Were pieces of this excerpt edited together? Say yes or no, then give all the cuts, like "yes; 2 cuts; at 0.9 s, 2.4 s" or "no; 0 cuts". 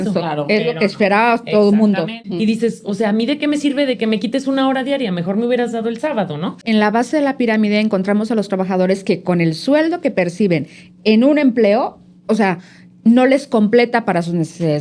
yes; 2 cuts; at 2.2 s, 6.6 s